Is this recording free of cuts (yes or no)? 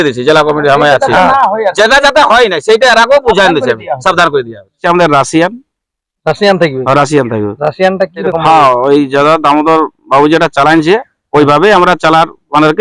no